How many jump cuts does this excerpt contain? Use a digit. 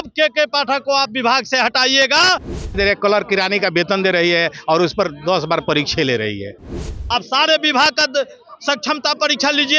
2